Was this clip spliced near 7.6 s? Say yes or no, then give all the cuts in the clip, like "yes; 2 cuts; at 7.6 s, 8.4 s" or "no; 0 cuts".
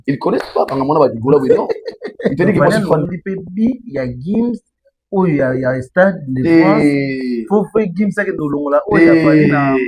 no; 1 cut; at 3.0 s